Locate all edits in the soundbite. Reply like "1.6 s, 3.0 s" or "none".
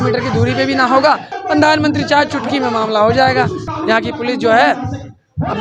1.3 s, 3.7 s